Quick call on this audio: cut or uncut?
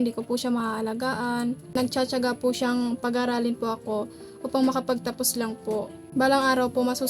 cut